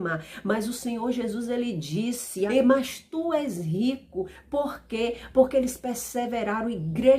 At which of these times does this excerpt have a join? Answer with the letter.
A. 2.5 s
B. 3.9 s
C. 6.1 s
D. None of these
A